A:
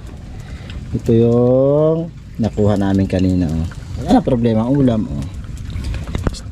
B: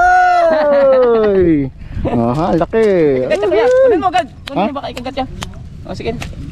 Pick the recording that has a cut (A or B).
A